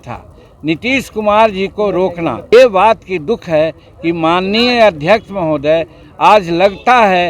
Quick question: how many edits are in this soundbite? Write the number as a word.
one